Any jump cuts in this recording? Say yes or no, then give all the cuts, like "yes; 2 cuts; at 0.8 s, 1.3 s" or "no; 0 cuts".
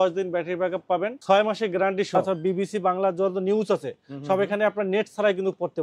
yes; 1 cut; at 2.2 s